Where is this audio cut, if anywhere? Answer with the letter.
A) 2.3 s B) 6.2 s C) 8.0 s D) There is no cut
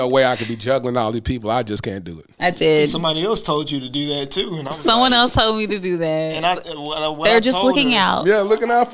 A